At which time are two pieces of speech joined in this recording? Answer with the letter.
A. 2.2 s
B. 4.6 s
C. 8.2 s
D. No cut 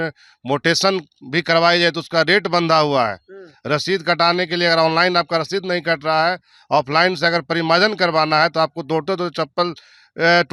D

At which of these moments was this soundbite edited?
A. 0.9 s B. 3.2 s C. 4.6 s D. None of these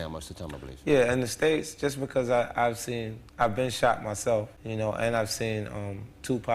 C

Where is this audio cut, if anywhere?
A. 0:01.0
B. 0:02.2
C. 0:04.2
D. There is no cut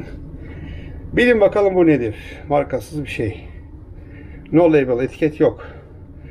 D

